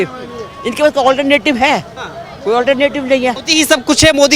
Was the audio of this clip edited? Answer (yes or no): yes